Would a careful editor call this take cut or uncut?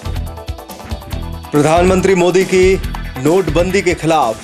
cut